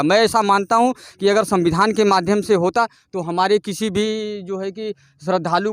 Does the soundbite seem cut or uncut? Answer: uncut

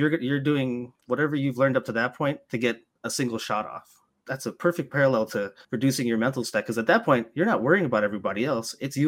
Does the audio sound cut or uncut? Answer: cut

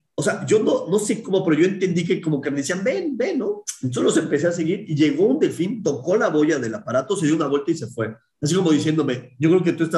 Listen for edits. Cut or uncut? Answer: uncut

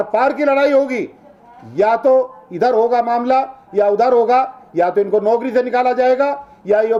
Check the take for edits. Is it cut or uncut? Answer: uncut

